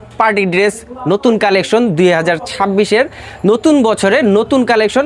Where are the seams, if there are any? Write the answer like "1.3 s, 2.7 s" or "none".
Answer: none